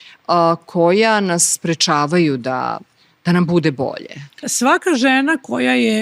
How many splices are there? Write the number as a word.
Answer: one